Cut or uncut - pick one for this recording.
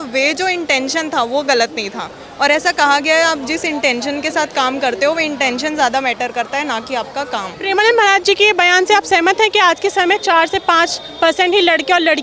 uncut